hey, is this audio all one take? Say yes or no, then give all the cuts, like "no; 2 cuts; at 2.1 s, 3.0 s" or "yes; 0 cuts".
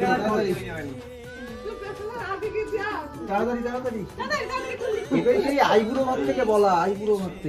yes; 0 cuts